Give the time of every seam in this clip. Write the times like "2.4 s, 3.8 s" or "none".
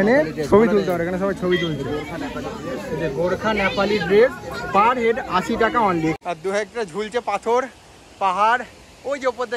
6.2 s